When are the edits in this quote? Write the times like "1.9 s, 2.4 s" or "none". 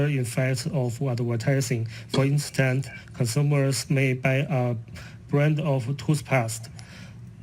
5.2 s